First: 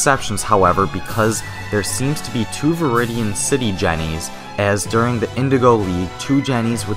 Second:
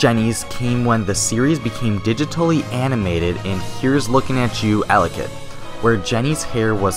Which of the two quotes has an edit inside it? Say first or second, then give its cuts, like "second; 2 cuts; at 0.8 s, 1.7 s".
first; 1 cut; at 4.0 s